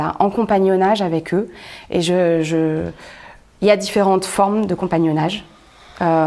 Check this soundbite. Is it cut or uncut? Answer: uncut